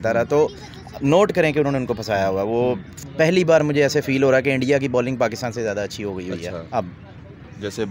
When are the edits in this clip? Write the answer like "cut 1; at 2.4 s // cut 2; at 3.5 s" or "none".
cut 1; at 2.9 s